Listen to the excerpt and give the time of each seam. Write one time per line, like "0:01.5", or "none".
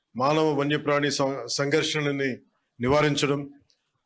none